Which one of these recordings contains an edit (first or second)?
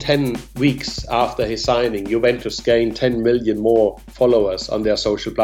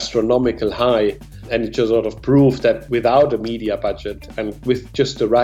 second